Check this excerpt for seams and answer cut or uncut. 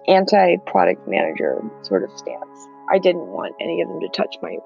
uncut